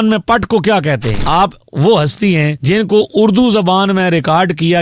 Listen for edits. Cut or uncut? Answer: cut